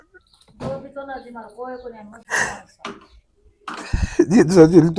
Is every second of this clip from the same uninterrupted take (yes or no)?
yes